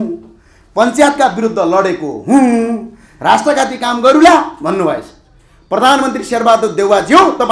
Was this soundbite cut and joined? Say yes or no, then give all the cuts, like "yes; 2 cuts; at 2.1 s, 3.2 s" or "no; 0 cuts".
no; 0 cuts